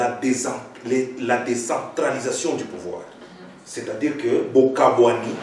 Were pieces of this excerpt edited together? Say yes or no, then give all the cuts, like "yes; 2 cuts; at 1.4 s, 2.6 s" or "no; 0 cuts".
no; 0 cuts